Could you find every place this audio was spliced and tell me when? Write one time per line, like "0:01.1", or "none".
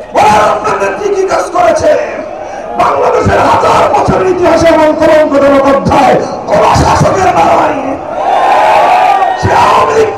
none